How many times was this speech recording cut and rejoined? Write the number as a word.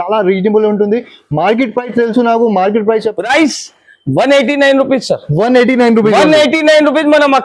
one